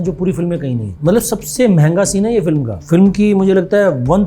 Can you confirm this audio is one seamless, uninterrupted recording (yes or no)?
no